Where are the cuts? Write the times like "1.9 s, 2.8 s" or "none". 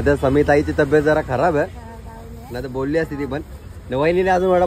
none

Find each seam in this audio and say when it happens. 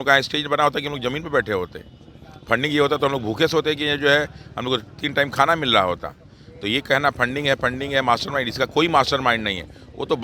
none

